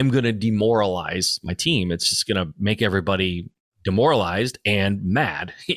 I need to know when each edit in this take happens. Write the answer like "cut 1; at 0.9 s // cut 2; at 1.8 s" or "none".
none